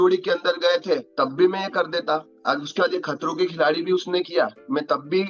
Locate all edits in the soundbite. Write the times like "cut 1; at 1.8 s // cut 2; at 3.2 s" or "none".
cut 1; at 1.1 s // cut 2; at 2.3 s